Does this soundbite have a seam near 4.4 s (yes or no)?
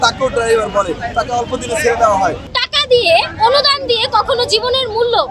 no